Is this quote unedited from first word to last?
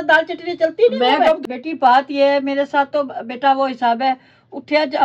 no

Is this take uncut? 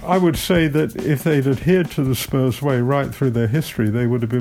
yes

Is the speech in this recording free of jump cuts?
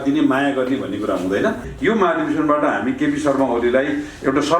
no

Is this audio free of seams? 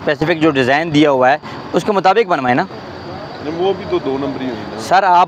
yes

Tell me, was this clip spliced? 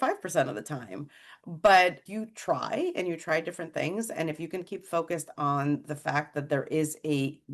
no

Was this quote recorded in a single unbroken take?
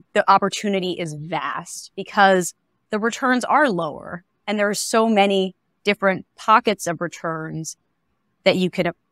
yes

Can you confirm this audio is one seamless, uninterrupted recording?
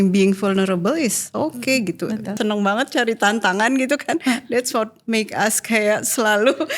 no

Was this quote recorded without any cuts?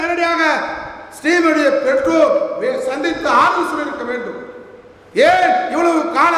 yes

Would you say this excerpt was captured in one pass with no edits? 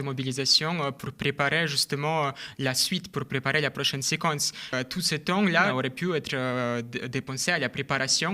no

